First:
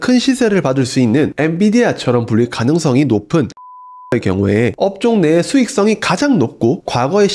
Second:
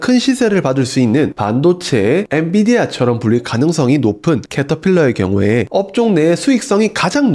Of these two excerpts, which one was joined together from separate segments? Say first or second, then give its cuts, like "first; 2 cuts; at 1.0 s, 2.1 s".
first; 1 cut; at 1.3 s